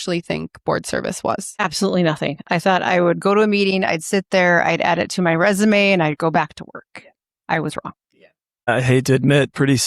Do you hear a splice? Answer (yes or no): no